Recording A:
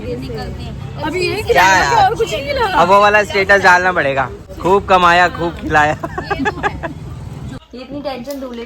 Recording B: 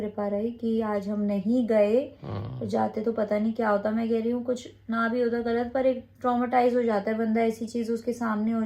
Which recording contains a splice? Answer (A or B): A